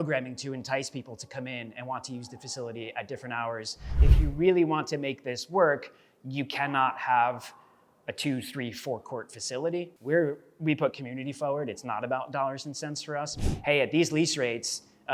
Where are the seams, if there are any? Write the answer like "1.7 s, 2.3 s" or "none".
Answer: 3.9 s, 9.9 s, 13.4 s